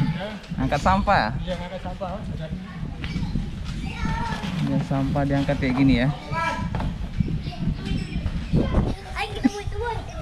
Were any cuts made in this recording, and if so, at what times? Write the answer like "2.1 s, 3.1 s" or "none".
8.9 s